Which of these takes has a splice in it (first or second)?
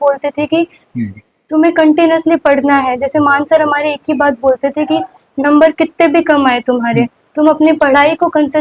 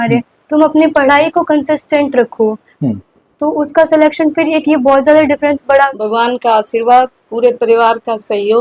second